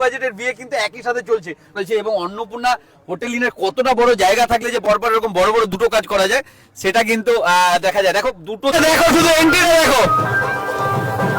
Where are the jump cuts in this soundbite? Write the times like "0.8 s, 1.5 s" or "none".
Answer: 1.7 s, 8.7 s